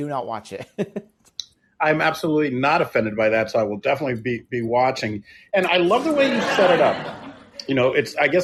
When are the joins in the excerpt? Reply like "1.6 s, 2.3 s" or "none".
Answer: none